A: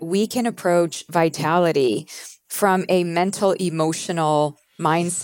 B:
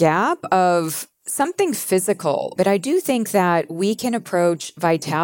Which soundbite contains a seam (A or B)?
B